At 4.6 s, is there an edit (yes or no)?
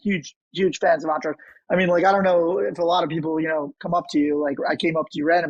no